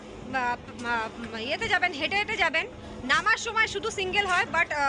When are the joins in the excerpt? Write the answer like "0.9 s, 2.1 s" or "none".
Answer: none